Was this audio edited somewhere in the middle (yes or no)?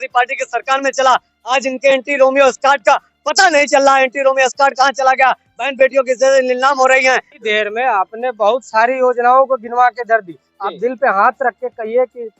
yes